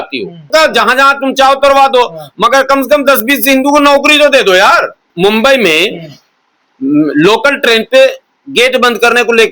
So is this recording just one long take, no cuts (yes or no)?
no